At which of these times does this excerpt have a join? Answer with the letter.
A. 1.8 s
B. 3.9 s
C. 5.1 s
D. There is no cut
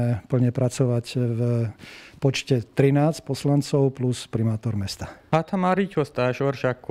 C